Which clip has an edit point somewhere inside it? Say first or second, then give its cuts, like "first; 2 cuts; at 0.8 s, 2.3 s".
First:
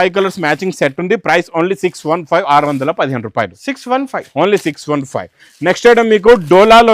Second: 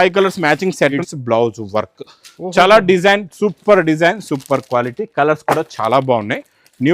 second; 1 cut; at 1.0 s